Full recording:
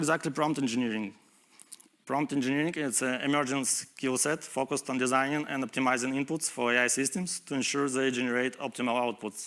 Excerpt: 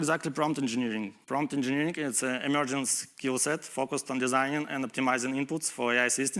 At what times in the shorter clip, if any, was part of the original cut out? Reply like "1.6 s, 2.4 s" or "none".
1.2 s